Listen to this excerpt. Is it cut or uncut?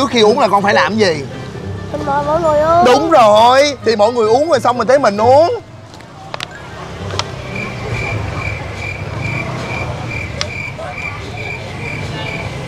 uncut